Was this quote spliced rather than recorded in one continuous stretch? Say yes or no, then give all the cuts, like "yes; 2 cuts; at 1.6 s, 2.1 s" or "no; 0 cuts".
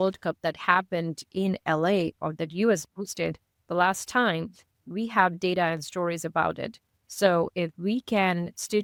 no; 0 cuts